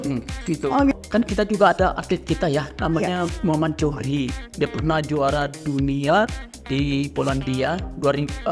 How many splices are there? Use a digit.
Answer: 1